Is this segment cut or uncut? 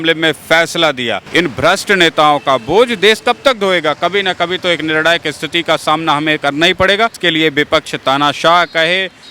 cut